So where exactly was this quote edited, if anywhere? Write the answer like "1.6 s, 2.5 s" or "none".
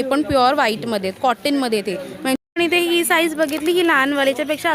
2.2 s